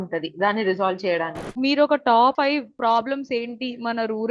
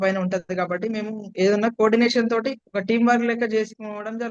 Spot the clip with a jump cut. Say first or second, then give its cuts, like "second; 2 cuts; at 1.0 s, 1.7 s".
first; 2 cuts; at 1.5 s, 2.5 s